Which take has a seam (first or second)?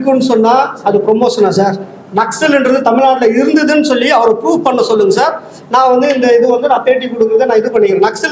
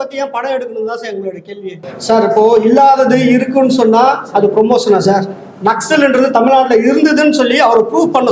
second